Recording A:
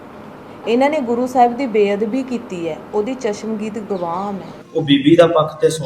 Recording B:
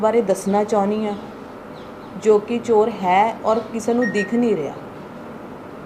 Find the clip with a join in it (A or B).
A